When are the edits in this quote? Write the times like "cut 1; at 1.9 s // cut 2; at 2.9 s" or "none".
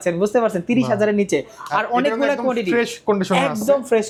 none